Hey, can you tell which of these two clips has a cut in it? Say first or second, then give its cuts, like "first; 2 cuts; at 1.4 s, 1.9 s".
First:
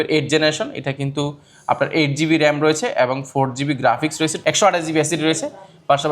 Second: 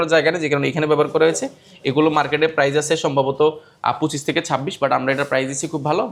first; 1 cut; at 4.4 s